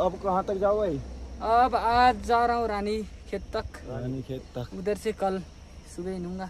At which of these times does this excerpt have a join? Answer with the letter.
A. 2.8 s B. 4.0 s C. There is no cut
C